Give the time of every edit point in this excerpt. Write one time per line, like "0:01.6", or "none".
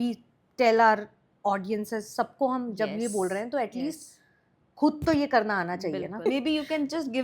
0:06.3